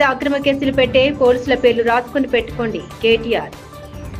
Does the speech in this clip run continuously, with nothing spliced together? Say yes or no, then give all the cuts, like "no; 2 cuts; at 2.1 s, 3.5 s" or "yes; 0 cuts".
yes; 0 cuts